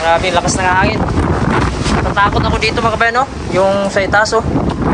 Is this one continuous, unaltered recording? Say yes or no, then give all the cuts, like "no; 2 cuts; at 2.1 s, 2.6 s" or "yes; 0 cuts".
yes; 0 cuts